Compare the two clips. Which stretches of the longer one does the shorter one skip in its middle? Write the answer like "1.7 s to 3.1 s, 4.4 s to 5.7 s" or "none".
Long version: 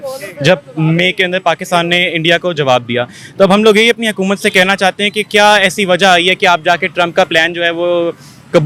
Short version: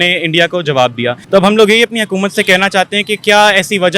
3.1 s to 3.3 s